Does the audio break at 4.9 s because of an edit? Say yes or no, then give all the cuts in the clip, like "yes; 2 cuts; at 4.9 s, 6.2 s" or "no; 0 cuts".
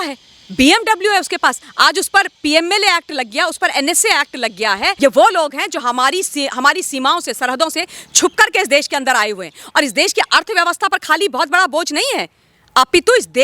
yes; 1 cut; at 4.9 s